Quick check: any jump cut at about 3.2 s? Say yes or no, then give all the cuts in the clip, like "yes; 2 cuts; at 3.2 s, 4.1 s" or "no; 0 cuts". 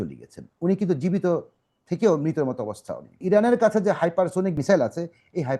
yes; 2 cuts; at 3.2 s, 4.6 s